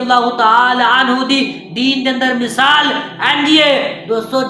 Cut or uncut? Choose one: uncut